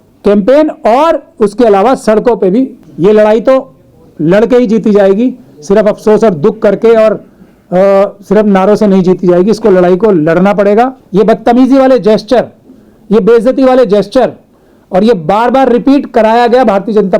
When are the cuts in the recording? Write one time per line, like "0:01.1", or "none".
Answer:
0:02.8
0:11.0